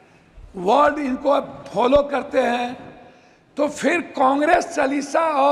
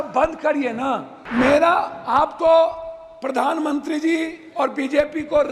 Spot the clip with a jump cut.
second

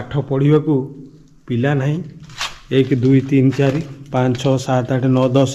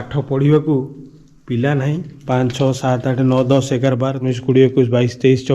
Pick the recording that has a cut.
second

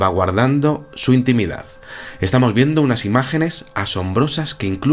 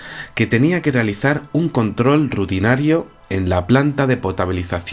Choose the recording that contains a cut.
second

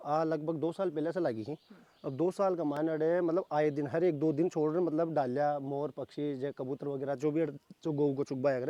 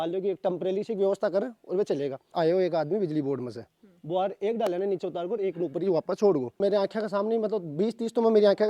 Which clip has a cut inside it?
second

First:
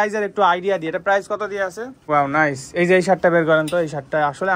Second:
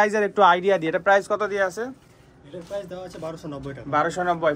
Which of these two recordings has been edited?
first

